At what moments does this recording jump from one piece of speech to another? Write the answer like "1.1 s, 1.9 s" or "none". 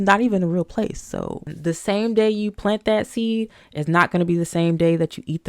1.5 s